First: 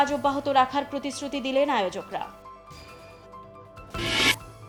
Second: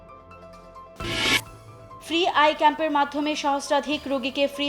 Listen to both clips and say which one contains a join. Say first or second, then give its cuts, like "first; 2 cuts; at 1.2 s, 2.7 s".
second; 1 cut; at 0.9 s